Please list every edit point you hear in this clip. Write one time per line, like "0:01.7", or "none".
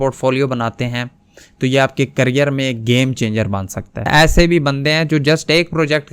0:04.1